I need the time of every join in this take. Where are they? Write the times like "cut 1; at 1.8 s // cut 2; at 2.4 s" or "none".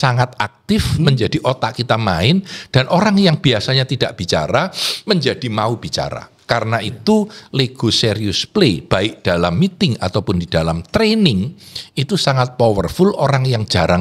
none